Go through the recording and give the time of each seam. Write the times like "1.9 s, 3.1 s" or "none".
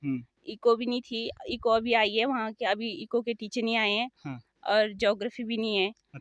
none